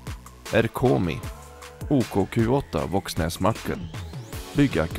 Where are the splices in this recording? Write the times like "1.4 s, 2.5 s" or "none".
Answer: none